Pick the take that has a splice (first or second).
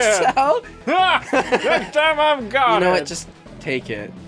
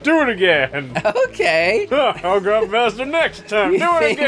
second